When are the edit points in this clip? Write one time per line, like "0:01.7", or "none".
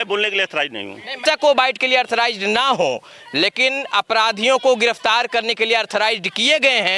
0:01.2